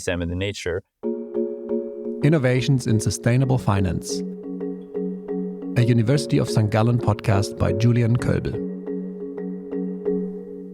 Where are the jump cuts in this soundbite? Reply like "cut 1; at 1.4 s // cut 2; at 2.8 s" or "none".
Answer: cut 1; at 0.9 s